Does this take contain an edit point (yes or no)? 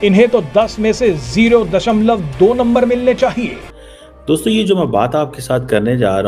yes